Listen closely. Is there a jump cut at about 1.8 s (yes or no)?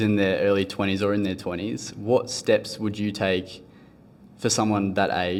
no